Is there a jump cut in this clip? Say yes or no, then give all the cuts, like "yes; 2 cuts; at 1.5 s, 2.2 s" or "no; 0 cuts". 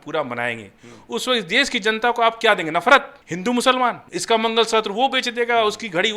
yes; 2 cuts; at 3.2 s, 4.1 s